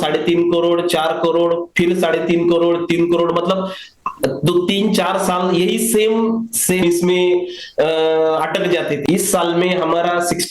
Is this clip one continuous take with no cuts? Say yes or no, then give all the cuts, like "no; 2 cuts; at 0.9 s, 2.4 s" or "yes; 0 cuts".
no; 2 cuts; at 6.8 s, 9.0 s